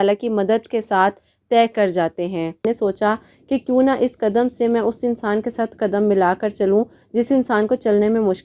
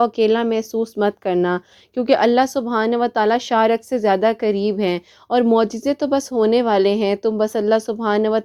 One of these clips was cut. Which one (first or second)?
first